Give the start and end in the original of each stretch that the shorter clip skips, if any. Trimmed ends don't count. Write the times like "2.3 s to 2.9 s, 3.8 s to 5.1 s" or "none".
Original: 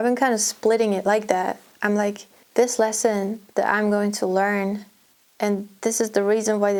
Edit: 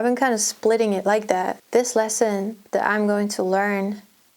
1.6 s to 2.4 s